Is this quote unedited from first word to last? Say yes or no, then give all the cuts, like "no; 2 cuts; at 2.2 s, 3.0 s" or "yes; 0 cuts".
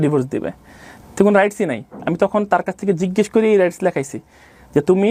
yes; 0 cuts